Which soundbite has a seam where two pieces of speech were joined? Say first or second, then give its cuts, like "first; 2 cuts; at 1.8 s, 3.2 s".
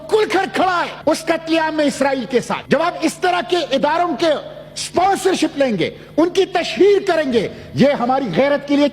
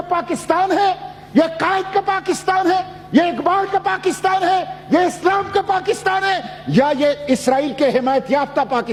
first; 2 cuts; at 0.9 s, 2.6 s